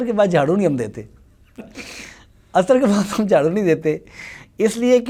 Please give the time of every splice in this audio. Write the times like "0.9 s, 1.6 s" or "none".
none